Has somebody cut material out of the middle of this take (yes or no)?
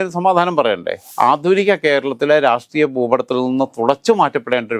yes